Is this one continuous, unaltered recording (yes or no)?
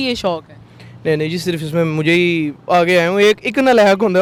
yes